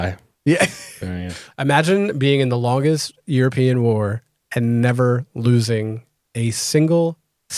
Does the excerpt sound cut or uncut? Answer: cut